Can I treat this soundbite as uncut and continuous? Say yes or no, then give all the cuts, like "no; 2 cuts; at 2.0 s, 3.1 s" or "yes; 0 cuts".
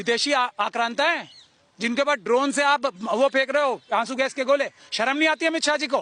yes; 0 cuts